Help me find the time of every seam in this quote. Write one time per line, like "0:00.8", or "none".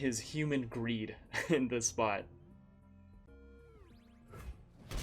0:03.3